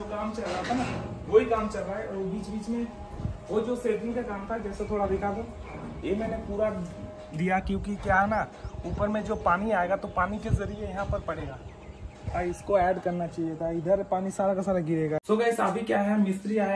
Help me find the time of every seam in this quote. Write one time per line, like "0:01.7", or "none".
0:15.2